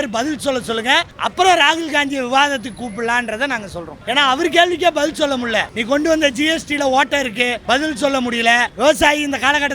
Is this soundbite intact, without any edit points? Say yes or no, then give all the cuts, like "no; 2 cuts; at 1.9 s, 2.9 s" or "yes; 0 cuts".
no; 5 cuts; at 1.2 s, 3.9 s, 5.7 s, 7.6 s, 8.7 s